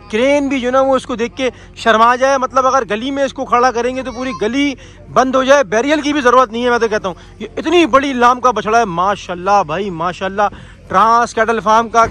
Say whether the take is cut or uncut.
uncut